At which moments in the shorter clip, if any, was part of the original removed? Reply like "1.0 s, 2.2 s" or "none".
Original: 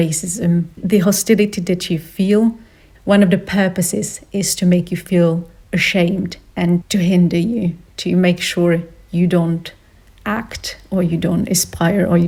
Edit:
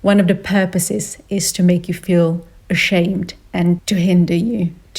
none